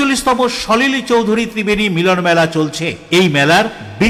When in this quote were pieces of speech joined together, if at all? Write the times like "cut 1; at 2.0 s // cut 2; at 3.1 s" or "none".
none